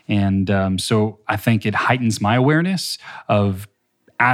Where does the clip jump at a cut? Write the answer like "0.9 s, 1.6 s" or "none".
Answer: none